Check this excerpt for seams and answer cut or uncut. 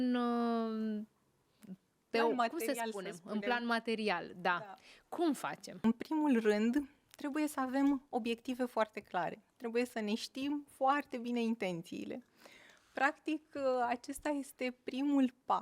cut